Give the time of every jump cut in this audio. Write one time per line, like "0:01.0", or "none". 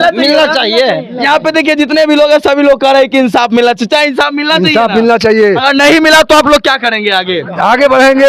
none